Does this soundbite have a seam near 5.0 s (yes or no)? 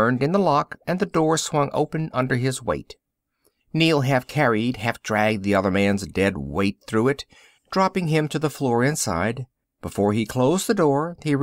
yes